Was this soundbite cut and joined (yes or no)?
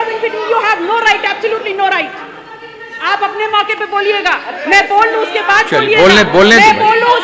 no